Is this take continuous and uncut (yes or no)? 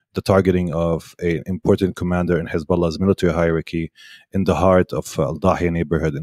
yes